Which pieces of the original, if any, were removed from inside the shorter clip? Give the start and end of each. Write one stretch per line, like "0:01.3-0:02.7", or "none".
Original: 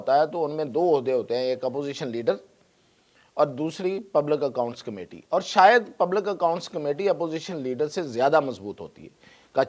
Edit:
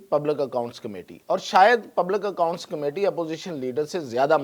none